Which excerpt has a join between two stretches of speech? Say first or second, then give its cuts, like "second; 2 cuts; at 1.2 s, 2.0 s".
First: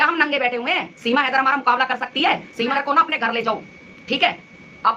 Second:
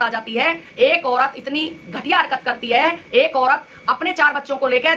first; 1 cut; at 2.7 s